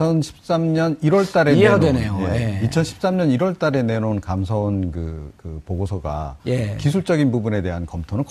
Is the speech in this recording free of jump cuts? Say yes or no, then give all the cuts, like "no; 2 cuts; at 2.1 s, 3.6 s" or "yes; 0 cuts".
no; 1 cut; at 2.3 s